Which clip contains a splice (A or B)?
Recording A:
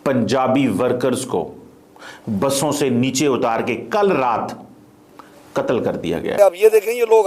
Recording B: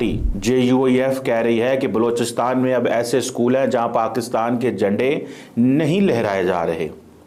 A